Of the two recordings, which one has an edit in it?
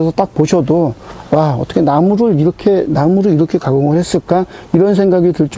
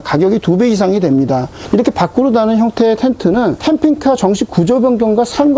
second; 2 cuts; at 1.5 s, 3.6 s

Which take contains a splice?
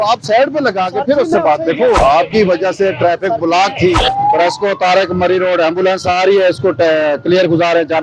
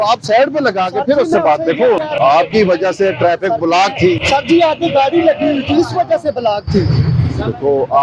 first; 2 cuts; at 2.0 s, 4.0 s

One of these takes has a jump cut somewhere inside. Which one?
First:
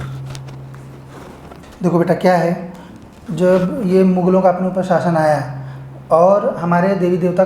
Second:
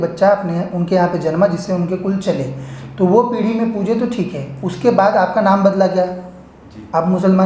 first; 1 cut; at 1.6 s

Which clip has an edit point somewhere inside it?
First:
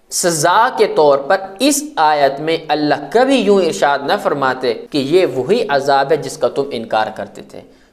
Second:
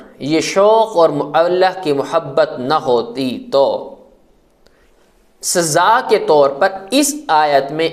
first; 1 cut; at 4.8 s

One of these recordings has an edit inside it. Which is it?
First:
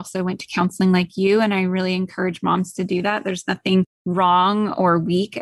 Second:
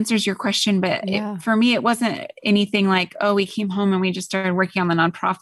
first; 1 cut; at 4.0 s

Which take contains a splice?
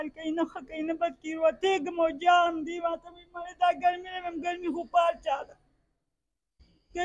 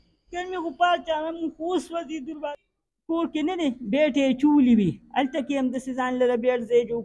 second; 1 cut; at 2.5 s

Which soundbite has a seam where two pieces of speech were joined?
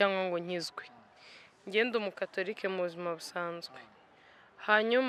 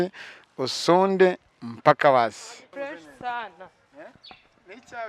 second; 1 cut; at 2.5 s

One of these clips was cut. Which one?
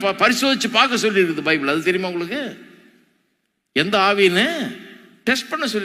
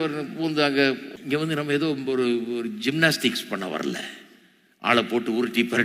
second; 1 cut; at 1.1 s

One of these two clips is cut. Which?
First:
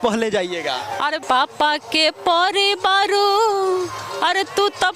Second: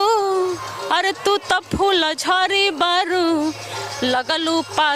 first; 1 cut; at 1.2 s

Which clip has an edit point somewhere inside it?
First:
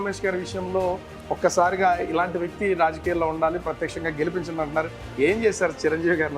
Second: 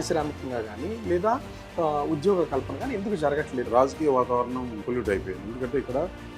second; 2 cuts; at 3.7 s, 4.8 s

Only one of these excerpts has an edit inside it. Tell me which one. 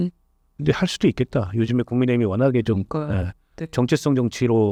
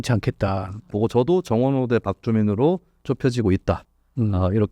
second; 1 cut; at 0.9 s

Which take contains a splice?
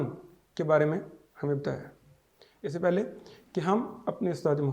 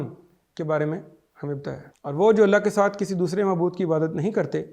second; 1 cut; at 1.9 s

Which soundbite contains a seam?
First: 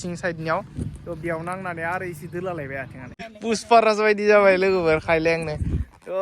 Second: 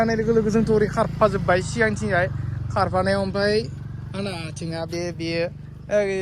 first; 1 cut; at 3.3 s

